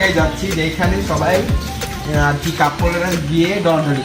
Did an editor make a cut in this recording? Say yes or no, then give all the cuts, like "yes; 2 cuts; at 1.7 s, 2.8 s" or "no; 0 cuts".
no; 0 cuts